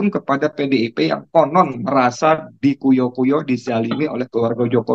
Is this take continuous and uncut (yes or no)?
yes